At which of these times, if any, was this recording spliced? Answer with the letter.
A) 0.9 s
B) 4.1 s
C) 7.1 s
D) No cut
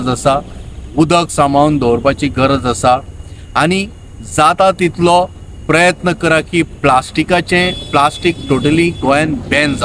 D